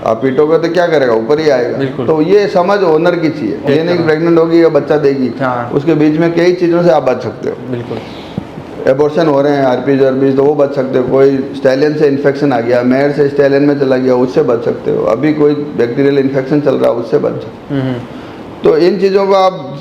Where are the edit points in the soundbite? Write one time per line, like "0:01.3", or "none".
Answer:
0:03.6